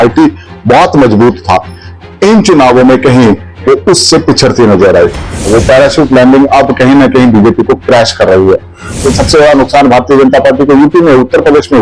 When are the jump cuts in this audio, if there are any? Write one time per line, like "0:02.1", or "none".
0:05.5
0:09.0